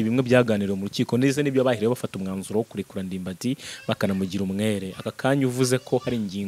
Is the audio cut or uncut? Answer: uncut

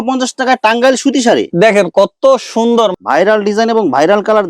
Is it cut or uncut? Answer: cut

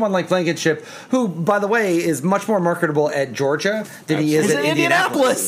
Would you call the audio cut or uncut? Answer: uncut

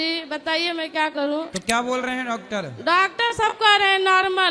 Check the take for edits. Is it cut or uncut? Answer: cut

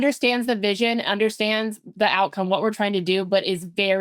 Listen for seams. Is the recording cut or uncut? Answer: uncut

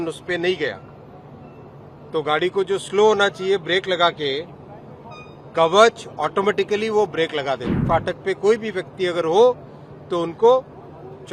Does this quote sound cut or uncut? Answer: cut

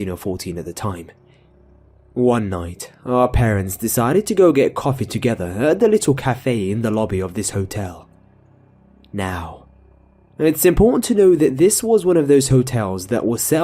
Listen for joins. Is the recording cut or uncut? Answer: cut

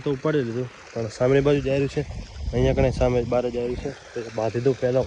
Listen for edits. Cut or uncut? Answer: uncut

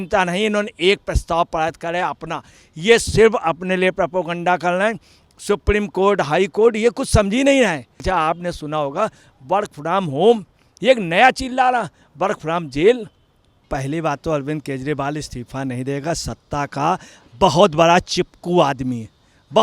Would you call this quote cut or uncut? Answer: cut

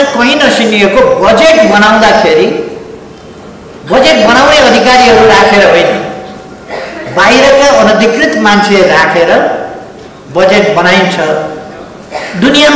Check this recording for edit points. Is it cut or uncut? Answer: uncut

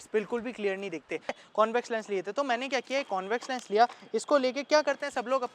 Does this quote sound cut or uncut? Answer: cut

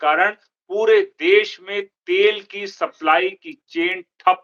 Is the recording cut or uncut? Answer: uncut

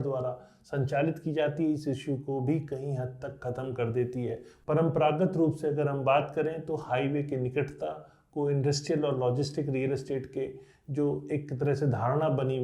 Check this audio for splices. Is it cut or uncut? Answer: cut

